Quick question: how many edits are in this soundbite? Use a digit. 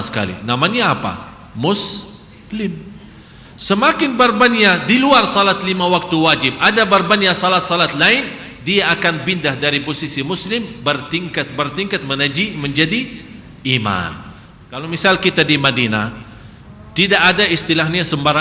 1